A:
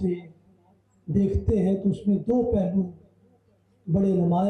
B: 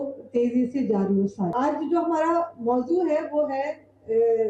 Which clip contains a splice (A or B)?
B